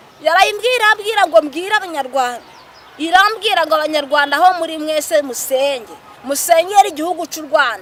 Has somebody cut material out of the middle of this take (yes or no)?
no